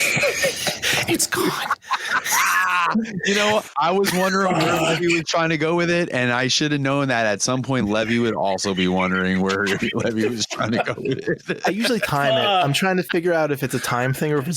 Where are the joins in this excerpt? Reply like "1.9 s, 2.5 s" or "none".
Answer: 3.7 s